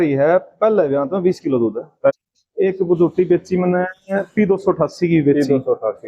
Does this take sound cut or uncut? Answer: cut